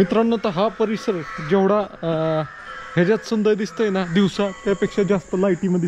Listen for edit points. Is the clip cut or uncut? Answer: uncut